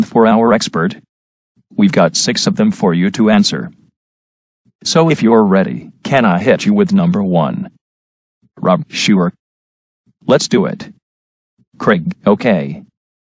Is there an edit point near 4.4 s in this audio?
no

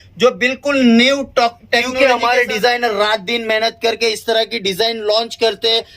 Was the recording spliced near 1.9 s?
yes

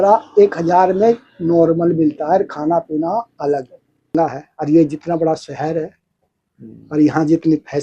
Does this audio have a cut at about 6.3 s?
no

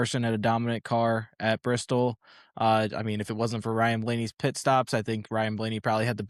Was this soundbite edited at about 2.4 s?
no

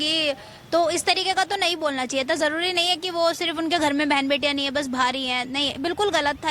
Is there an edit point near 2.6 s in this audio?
no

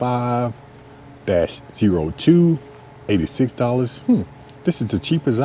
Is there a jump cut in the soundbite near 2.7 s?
no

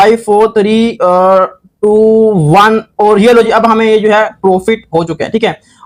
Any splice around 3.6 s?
no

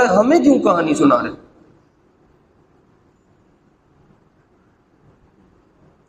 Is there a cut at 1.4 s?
no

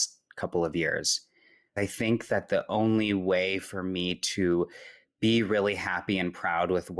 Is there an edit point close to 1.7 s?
yes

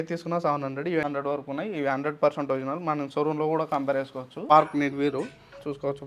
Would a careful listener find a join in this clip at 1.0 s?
yes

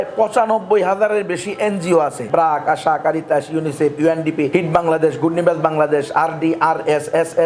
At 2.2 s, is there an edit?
yes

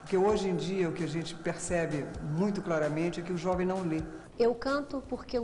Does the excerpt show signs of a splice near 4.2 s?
yes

